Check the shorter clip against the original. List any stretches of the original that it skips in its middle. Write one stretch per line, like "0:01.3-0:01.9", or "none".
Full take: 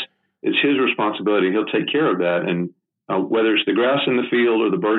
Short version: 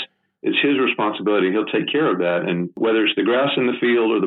0:02.8-0:03.3